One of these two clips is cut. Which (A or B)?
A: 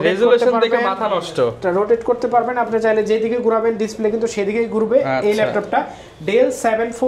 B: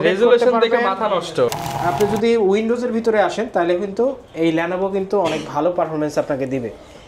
B